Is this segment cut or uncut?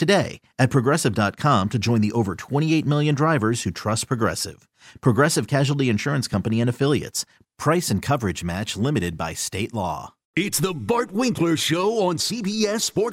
cut